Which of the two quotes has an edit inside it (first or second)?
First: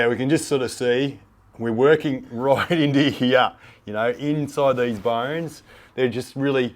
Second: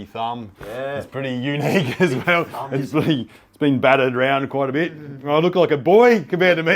first